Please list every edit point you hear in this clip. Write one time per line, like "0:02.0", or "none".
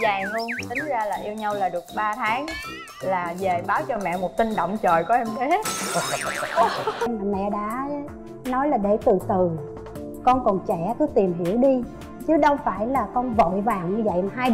0:07.1